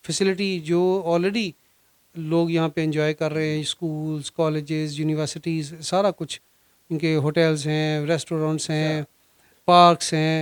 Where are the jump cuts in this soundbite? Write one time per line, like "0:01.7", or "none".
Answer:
none